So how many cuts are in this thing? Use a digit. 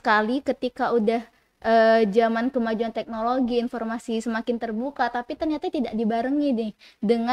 0